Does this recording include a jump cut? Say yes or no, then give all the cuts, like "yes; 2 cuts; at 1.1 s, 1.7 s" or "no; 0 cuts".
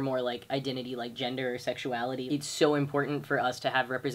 yes; 1 cut; at 2.3 s